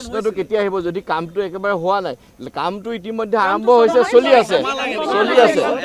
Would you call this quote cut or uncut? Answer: uncut